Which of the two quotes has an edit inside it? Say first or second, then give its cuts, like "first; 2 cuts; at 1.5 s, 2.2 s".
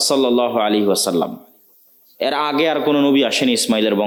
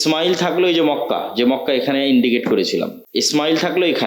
second; 1 cut; at 3.0 s